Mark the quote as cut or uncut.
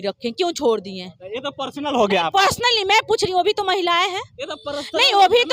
uncut